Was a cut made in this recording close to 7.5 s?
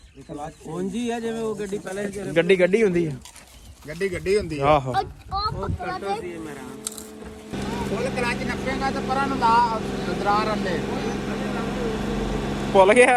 yes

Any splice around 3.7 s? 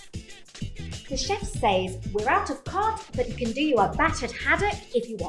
no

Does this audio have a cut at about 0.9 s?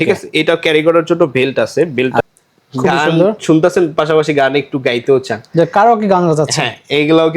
no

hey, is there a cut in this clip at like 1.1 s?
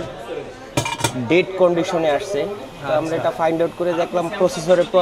no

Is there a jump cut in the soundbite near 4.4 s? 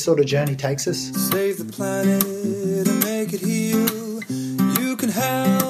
no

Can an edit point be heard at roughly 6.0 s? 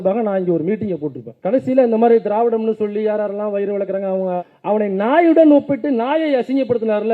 no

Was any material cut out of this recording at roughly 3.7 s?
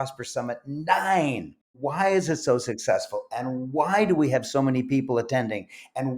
no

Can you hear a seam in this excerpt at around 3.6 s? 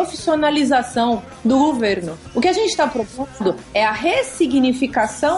no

